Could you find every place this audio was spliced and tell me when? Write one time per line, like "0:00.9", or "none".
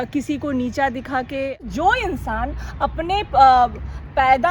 0:01.6